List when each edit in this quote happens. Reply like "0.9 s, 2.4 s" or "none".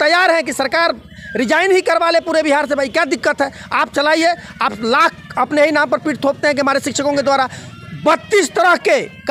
none